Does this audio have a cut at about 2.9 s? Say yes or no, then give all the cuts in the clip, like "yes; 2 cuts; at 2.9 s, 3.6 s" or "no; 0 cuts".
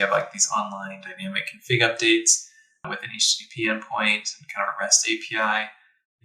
yes; 1 cut; at 2.9 s